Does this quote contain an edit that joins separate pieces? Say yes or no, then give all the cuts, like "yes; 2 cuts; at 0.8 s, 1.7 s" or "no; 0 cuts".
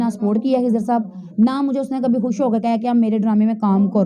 no; 0 cuts